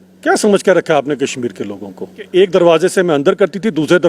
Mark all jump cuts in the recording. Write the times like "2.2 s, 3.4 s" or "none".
2.2 s

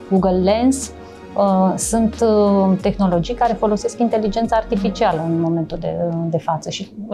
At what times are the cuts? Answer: none

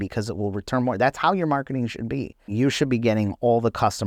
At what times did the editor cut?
2.5 s

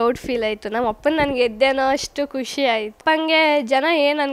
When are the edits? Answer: 3.0 s

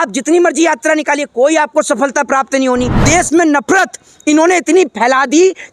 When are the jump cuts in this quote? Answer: 3.0 s

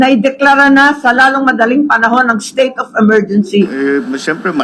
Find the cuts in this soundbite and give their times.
3.7 s

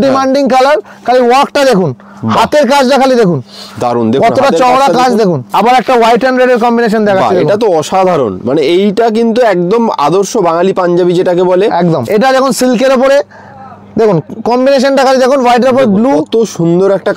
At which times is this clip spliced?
5.5 s, 12.1 s

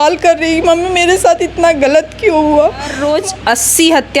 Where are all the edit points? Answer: 3.0 s

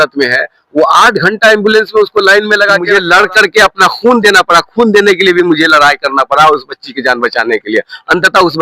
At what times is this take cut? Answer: 2.9 s

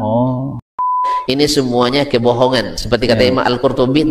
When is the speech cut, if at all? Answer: 1.0 s

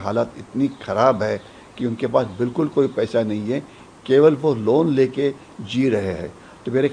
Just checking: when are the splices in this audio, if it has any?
none

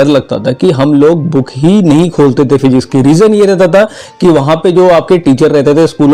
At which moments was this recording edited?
none

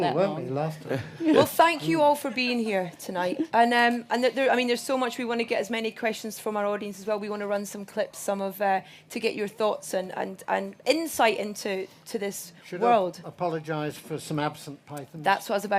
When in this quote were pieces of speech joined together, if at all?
10.9 s

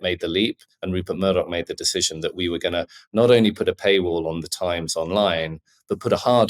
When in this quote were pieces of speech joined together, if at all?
none

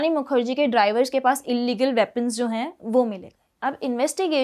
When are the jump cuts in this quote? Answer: none

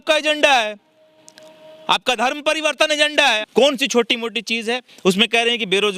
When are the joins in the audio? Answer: 3.4 s

